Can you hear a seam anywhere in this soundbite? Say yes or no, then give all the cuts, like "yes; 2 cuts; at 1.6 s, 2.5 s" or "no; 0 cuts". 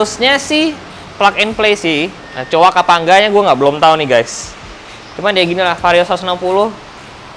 no; 0 cuts